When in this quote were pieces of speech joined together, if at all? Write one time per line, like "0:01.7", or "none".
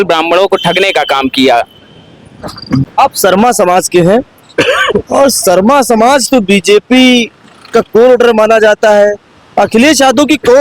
0:02.8

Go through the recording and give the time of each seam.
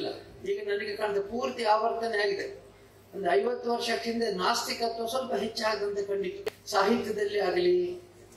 0:06.5

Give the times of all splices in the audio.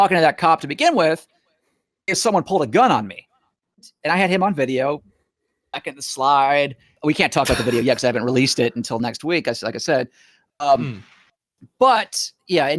0:03.9
0:06.9

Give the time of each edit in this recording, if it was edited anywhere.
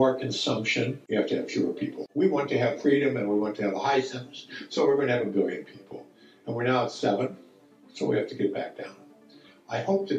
0:02.0

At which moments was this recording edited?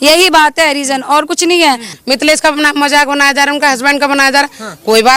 0:01.9

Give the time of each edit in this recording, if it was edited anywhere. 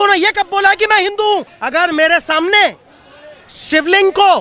0:01.6

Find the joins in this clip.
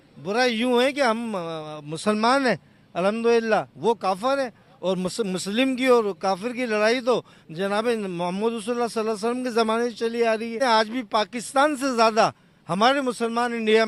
none

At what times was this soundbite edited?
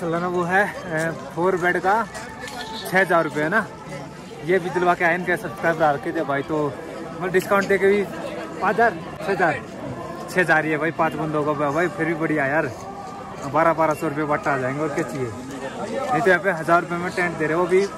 none

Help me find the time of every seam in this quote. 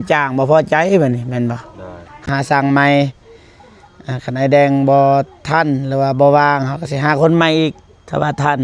0:02.3

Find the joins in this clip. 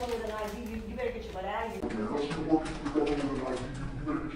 none

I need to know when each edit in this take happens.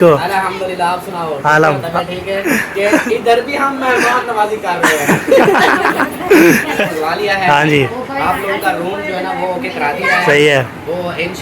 0:02.4
0:06.8

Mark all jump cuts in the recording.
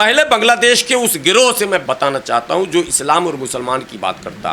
0:01.8

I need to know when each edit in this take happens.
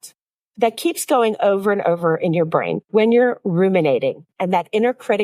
none

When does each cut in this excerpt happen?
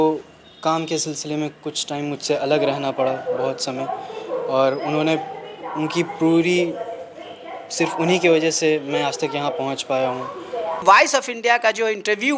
0:10.8

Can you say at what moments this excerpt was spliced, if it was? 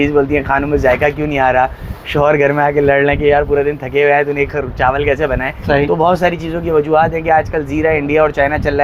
none

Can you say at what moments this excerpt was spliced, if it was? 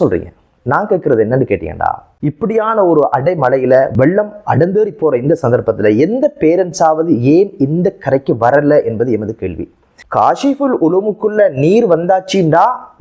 0:02.1
0:03.9
0:09.8

